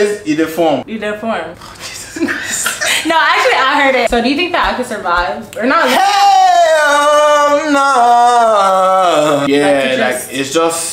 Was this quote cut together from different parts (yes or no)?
yes